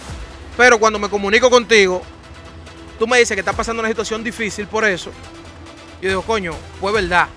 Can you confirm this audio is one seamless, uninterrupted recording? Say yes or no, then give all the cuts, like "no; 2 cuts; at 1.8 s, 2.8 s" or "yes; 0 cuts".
yes; 0 cuts